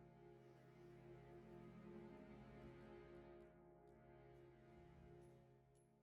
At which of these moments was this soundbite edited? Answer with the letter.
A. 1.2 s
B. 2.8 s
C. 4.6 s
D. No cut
D